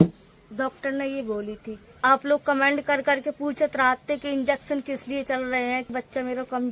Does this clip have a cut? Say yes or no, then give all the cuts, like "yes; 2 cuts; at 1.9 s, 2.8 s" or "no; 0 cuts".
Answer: yes; 2 cuts; at 2.0 s, 5.9 s